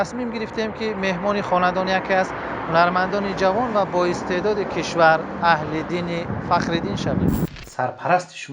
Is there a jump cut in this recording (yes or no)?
yes